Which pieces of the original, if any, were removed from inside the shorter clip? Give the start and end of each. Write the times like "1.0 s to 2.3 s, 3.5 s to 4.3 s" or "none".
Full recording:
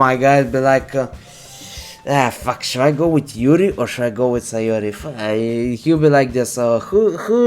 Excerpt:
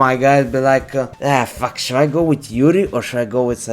1.1 s to 2.0 s